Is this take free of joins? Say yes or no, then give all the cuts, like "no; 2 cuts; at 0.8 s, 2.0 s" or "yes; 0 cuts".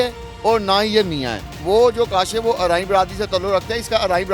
no; 1 cut; at 1.6 s